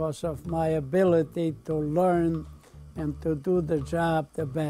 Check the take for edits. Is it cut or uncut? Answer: cut